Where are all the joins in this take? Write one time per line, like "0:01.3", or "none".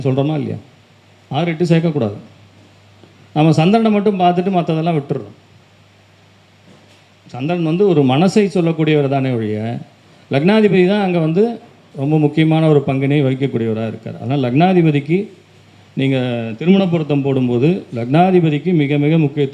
none